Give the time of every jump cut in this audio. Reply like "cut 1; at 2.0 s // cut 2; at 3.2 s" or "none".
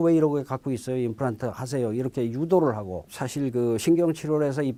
none